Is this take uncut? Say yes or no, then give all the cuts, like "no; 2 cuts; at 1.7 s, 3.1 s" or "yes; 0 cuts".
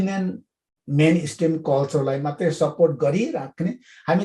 yes; 0 cuts